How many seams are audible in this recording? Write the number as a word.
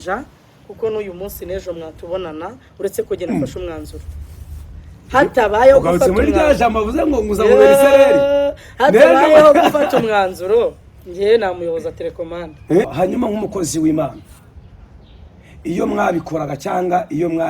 one